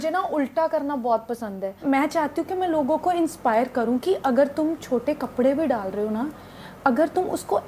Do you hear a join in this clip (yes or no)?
yes